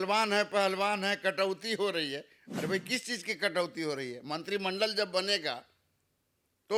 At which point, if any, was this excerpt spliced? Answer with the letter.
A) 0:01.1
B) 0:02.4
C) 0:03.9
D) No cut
D